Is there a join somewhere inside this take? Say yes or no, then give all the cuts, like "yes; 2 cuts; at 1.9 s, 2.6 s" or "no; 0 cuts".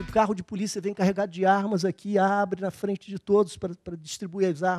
no; 0 cuts